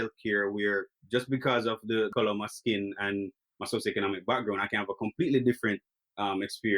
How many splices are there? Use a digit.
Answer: 1